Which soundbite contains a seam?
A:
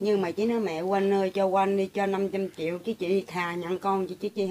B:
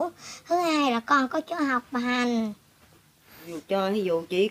B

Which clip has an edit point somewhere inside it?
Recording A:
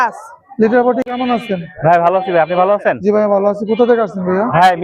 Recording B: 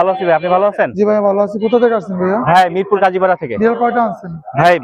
A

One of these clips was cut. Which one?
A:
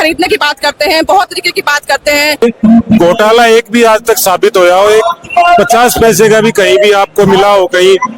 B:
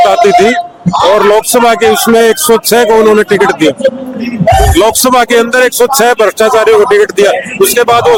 A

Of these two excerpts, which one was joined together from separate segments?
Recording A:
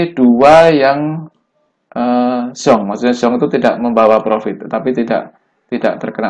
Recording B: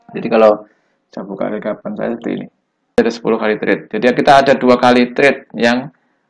B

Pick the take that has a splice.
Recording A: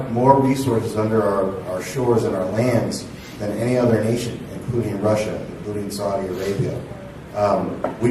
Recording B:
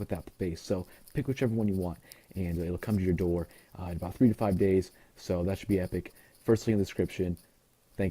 B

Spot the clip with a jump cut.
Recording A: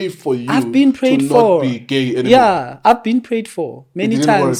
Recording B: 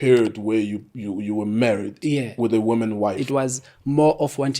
B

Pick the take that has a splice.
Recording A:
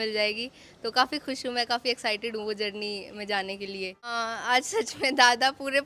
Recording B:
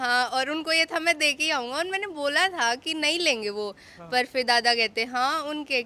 A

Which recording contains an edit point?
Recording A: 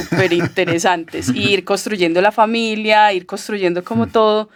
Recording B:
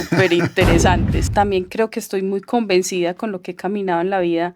B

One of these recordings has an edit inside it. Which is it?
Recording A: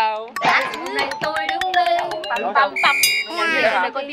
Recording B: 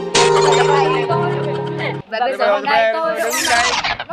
B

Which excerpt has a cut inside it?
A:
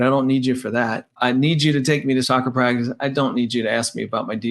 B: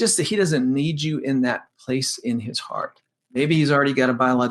A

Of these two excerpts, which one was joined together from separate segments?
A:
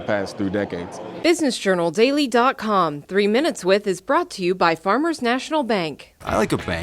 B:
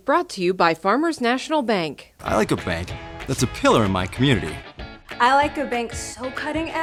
A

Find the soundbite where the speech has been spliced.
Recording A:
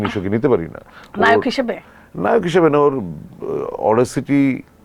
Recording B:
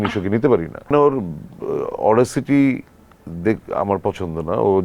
B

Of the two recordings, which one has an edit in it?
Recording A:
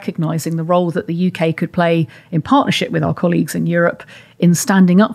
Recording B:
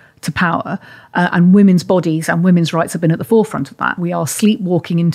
B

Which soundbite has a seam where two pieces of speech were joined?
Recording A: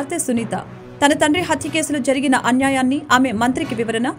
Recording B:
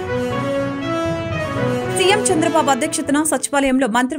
B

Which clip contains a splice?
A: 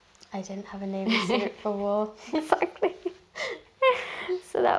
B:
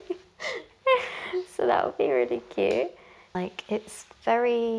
B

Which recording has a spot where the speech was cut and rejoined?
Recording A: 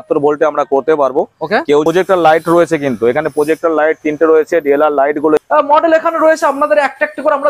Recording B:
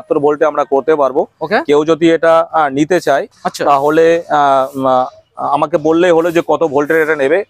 A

